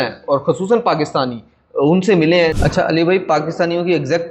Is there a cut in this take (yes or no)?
yes